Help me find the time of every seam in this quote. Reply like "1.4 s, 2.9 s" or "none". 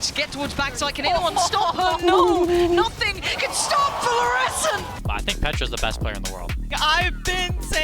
4.9 s, 6.7 s